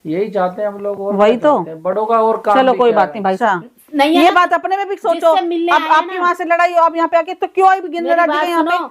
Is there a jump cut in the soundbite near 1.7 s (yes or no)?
no